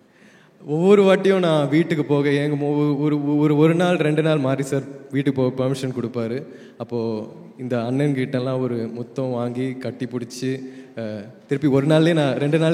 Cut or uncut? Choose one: uncut